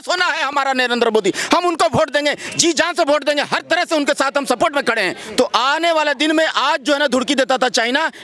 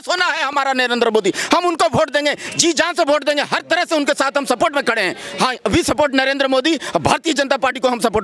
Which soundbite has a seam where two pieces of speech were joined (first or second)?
first